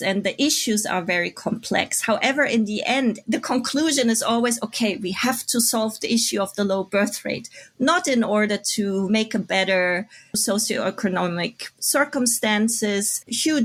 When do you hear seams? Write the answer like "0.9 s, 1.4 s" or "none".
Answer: none